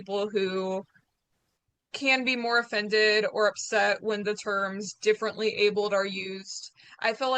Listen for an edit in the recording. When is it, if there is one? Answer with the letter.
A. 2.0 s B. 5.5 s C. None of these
C